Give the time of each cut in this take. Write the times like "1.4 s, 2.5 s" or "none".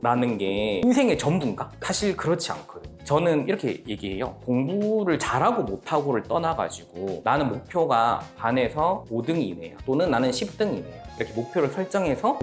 none

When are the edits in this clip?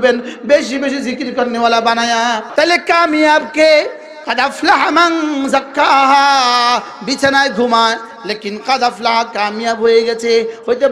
2.5 s

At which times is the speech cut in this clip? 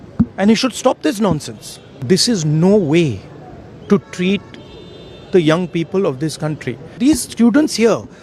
1.9 s, 7.0 s

